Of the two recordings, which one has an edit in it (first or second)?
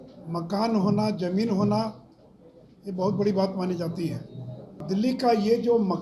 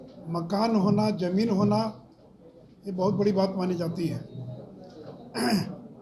first